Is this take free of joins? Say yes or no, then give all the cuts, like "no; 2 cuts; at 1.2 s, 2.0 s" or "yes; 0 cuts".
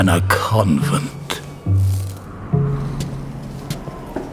yes; 0 cuts